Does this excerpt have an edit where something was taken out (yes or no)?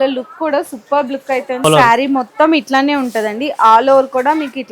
yes